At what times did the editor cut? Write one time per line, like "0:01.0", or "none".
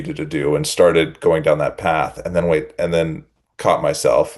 none